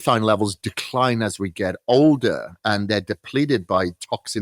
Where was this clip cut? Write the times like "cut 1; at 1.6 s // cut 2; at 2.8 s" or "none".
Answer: none